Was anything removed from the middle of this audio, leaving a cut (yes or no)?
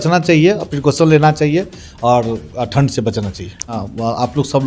yes